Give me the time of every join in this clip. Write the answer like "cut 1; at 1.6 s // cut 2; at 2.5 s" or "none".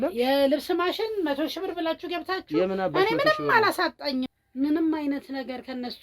cut 1; at 4.3 s